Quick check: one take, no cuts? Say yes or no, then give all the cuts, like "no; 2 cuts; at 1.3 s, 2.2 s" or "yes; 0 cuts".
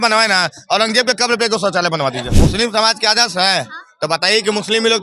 no; 1 cut; at 2.3 s